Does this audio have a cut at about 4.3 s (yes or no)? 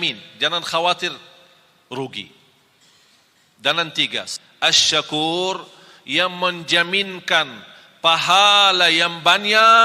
yes